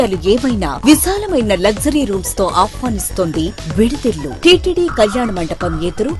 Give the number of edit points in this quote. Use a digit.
1